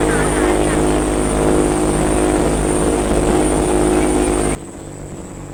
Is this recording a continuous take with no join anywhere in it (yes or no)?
yes